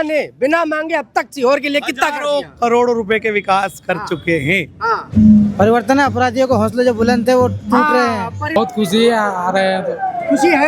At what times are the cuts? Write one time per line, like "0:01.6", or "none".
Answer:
0:05.0
0:08.6